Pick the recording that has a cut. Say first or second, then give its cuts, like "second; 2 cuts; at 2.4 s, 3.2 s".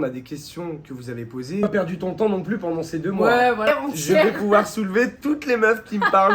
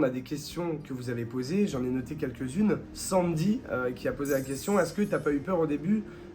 first; 2 cuts; at 1.6 s, 3.7 s